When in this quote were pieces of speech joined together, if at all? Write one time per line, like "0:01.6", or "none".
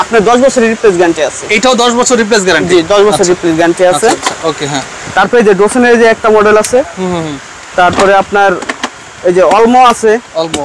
none